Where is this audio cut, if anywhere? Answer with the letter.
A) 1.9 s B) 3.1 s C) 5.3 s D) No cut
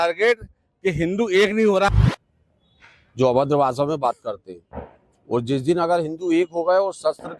A